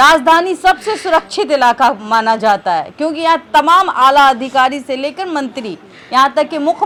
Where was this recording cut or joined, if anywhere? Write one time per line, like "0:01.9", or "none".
none

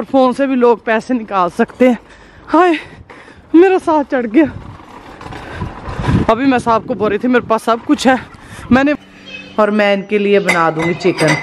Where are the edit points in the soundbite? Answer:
0:09.0

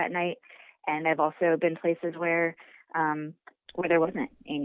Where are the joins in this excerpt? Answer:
none

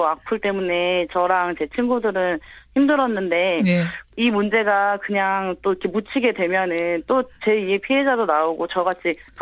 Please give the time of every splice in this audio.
none

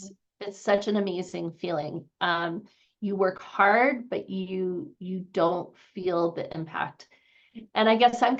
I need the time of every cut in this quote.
none

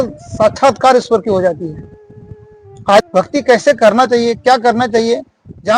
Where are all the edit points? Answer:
0:03.1

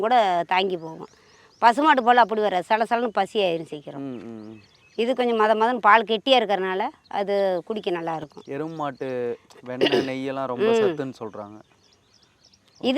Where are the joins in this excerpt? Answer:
none

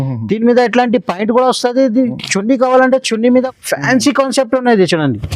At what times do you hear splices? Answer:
0:03.3

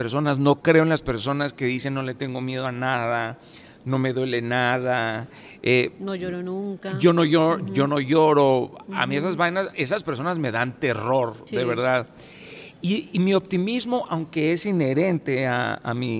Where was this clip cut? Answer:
none

